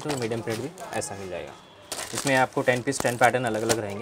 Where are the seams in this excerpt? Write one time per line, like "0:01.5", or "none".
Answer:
0:01.6